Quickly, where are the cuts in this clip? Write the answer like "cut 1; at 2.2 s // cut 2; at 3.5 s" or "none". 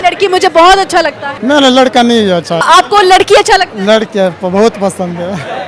cut 1; at 1.3 s // cut 2; at 2.6 s